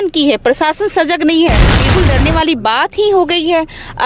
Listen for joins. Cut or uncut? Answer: cut